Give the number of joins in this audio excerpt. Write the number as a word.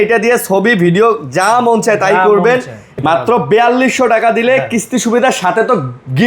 one